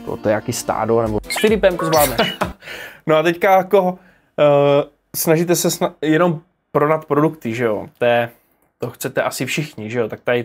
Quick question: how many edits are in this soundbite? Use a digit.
0